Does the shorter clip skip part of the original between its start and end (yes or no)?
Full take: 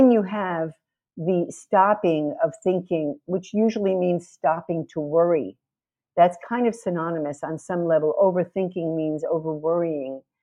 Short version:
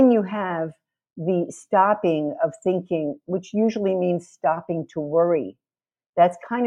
no